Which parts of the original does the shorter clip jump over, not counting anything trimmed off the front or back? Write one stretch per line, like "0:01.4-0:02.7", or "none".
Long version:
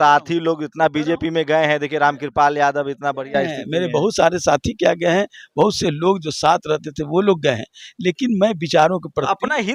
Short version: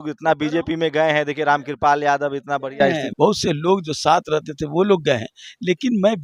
0:03.6-0:05.4